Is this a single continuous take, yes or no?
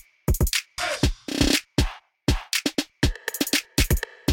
no